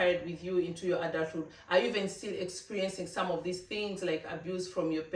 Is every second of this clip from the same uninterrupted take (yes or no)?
yes